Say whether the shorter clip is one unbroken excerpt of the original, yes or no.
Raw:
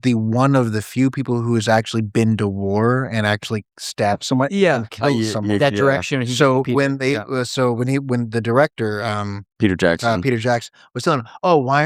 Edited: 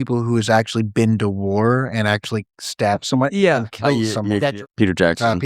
no